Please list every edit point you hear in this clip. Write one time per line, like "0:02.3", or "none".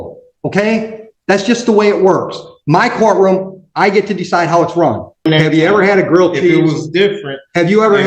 0:05.3